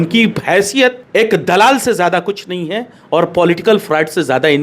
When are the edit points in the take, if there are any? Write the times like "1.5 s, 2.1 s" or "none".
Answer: 1.0 s